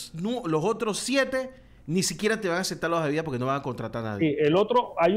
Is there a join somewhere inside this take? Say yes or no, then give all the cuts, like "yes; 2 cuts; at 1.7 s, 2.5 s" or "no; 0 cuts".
no; 0 cuts